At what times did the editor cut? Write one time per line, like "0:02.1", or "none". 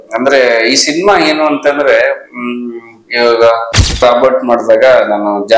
0:04.0